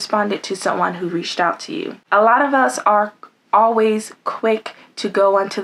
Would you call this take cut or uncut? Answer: uncut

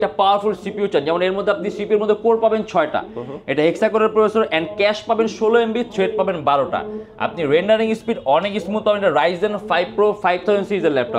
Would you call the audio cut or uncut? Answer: uncut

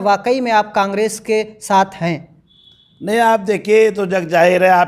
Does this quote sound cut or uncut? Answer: uncut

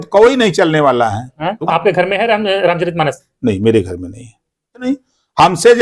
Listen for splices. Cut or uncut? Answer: cut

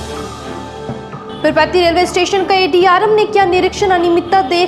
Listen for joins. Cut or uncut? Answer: cut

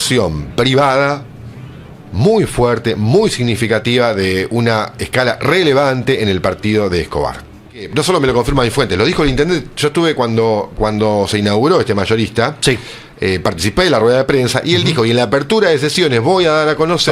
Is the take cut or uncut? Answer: cut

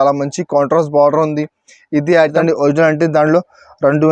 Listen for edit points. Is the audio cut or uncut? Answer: cut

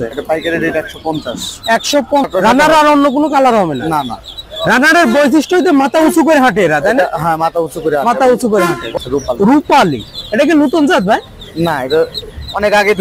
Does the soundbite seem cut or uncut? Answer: cut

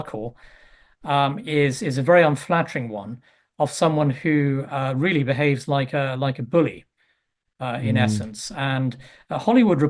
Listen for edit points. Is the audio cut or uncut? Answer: cut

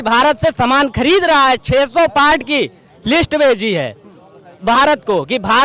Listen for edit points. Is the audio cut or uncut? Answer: uncut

